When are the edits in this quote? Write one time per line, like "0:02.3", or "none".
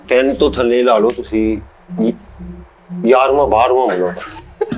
none